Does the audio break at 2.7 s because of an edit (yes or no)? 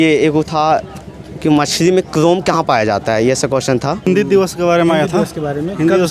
no